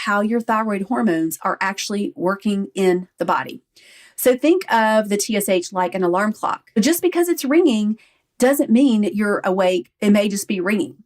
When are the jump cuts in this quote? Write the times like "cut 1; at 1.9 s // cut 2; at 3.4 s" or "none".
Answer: cut 1; at 7.0 s // cut 2; at 9.9 s